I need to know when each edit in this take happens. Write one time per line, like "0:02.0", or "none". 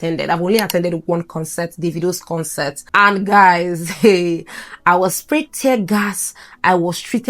0:02.8